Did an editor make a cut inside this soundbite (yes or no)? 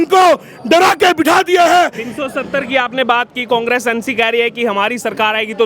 no